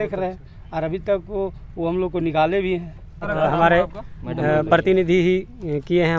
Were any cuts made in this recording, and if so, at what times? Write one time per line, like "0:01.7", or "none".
0:03.2